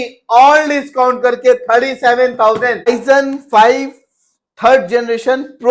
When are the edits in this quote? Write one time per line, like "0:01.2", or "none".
0:02.9